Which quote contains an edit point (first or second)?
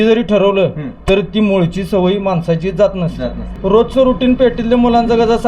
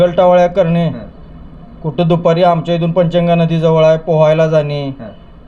first